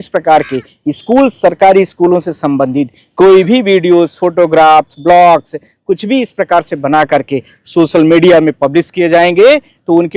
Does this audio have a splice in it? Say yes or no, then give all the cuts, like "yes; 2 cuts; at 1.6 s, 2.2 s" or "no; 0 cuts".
no; 0 cuts